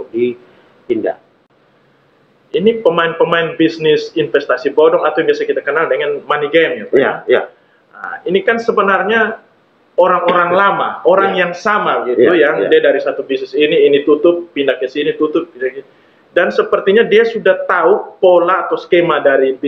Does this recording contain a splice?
yes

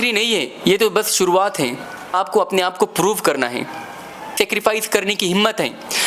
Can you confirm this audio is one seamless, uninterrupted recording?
no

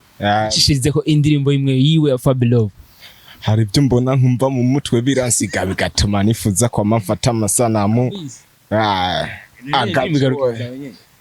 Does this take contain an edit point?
no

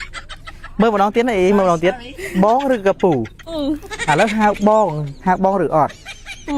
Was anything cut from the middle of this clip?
no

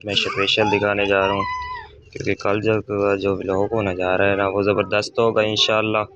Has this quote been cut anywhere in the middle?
no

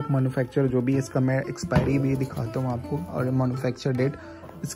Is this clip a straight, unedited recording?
yes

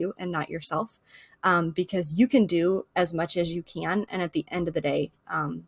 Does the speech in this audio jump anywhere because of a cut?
no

